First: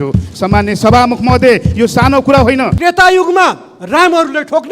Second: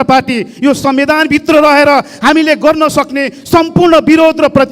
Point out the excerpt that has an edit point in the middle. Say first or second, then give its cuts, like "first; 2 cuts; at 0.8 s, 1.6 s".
first; 1 cut; at 2.8 s